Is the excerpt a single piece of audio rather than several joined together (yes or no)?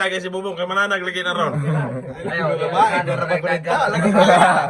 yes